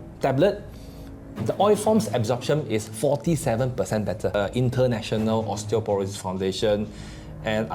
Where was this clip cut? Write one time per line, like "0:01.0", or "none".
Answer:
0:04.3